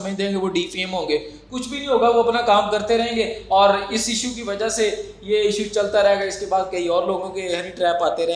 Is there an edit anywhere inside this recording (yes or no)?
no